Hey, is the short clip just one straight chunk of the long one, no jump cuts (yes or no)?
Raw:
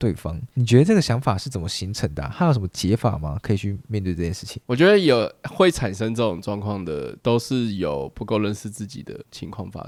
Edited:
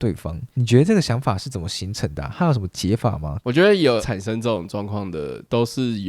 no